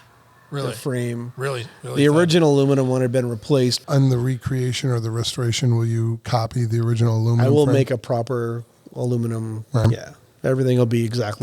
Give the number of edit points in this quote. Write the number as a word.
one